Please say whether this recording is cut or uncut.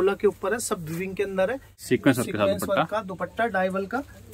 cut